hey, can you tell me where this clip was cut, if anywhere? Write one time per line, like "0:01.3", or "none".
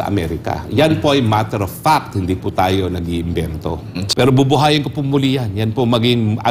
0:03.9